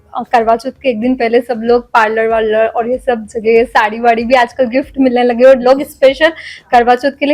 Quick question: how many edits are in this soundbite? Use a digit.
0